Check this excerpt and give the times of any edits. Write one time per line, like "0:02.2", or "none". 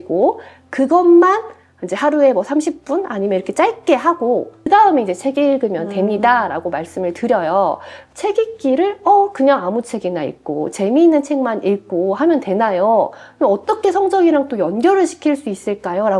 0:08.1